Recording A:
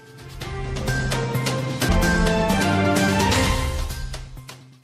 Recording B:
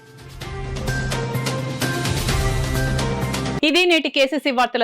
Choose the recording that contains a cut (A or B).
A